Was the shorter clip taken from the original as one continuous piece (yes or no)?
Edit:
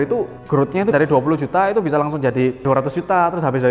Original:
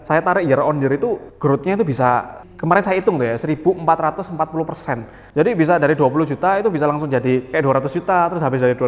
no